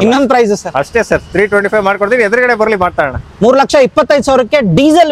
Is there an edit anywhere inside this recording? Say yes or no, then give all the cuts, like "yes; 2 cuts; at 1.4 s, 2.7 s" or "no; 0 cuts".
no; 0 cuts